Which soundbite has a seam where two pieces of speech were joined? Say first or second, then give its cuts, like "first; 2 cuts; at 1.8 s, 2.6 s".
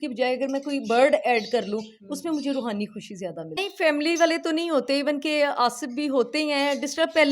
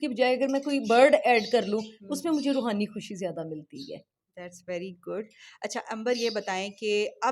first; 1 cut; at 3.6 s